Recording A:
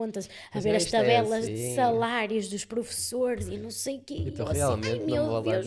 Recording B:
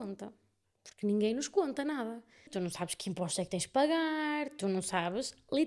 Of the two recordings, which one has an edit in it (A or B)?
B